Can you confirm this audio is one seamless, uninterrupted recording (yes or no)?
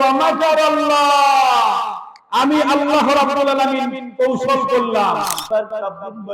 no